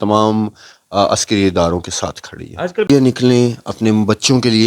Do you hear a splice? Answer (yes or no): yes